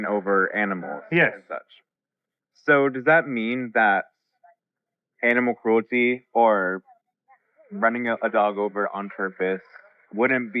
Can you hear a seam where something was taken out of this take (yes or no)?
no